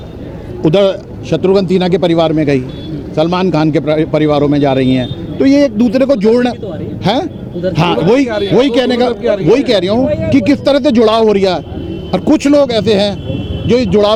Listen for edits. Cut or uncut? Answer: uncut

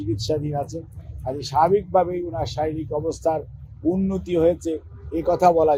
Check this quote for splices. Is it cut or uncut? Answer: uncut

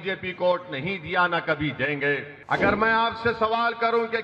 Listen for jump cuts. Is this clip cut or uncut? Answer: cut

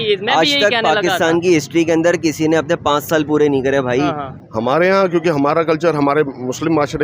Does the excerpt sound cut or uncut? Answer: cut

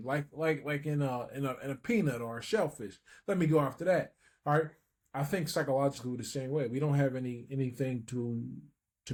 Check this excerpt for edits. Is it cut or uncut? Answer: uncut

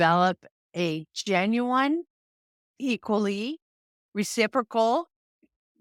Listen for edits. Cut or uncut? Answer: uncut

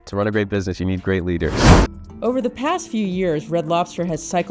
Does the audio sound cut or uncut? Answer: uncut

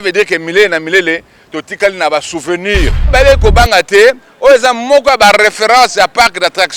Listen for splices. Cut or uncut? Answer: cut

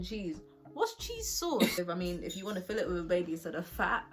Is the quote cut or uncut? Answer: cut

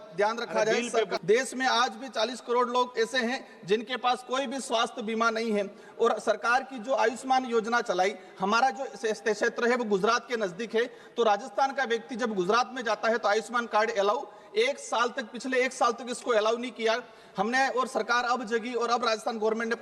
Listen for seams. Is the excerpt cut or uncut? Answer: cut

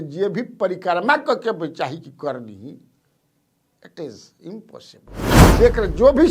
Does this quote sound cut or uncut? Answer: cut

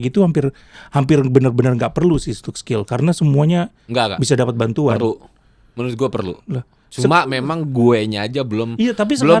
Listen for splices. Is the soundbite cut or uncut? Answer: uncut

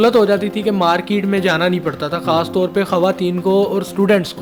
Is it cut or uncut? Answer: uncut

